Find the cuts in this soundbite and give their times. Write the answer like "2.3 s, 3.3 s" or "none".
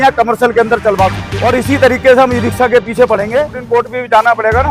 1.3 s, 3.6 s

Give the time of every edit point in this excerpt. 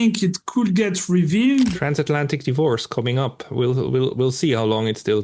1.7 s

